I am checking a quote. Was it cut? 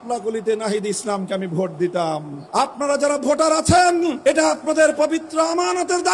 yes; 2 cuts; at 2.4 s, 4.2 s

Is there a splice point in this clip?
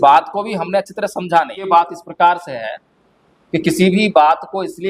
yes; 1 cut; at 1.7 s

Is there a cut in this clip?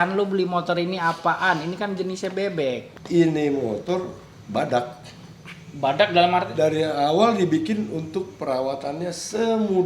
yes; 1 cut; at 2.9 s

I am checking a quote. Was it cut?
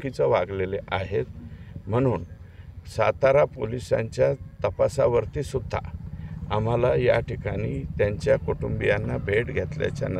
no; 0 cuts

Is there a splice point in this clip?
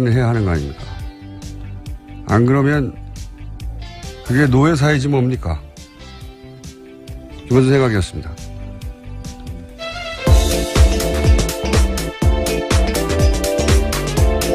no; 0 cuts

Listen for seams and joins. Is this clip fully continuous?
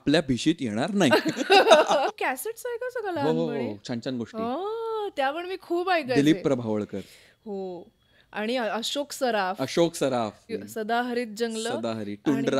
no; 2 cuts; at 2.1 s, 10.5 s

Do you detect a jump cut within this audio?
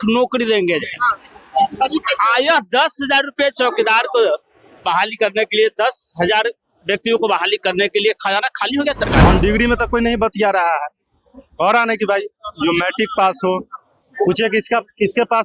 yes; 1 cut; at 9.3 s

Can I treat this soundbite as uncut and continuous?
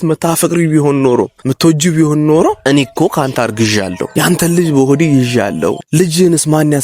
no; 4 cuts; at 1.4 s, 2.6 s, 4.0 s, 5.8 s

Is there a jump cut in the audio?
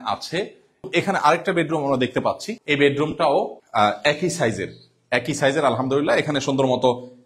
yes; 3 cuts; at 0.9 s, 2.5 s, 3.6 s

